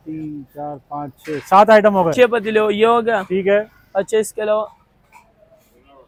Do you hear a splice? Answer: no; 0 cuts

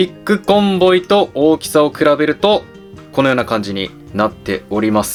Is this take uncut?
yes; 0 cuts

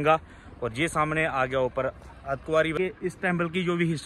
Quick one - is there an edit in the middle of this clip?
yes; 1 cut; at 2.8 s

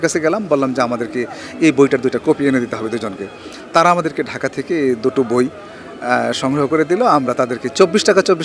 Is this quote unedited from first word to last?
yes; 0 cuts

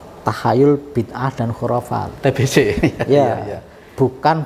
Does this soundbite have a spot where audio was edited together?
no; 0 cuts

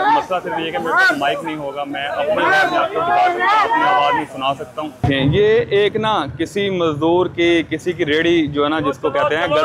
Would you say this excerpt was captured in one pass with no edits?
no; 1 cut; at 5.0 s

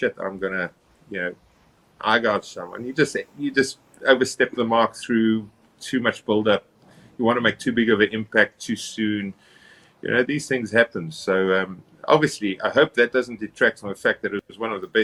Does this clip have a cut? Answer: no; 0 cuts

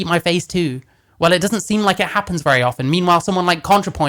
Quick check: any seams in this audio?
no; 0 cuts

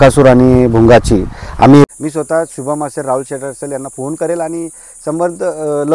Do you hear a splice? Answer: yes; 1 cut; at 1.9 s

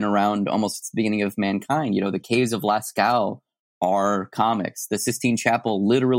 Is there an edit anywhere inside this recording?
no; 0 cuts

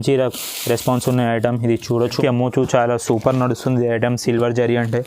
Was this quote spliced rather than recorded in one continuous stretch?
yes; 1 cut; at 2.2 s

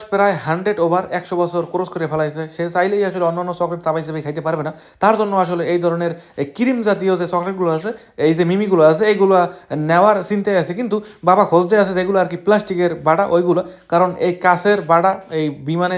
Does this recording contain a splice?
no; 0 cuts

